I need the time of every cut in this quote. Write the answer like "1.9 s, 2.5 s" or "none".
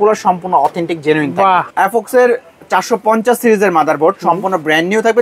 1.7 s